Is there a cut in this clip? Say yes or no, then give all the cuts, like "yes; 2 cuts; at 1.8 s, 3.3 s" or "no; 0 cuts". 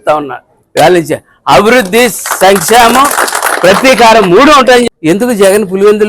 yes; 1 cut; at 4.8 s